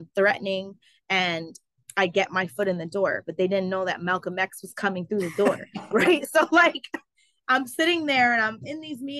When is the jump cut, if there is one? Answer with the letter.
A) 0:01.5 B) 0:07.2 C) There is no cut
C